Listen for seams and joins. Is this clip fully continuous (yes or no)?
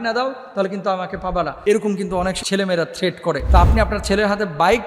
no